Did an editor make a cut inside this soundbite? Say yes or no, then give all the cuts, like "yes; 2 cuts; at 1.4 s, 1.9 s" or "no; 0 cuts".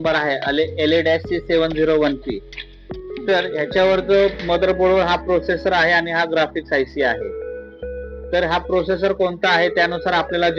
no; 0 cuts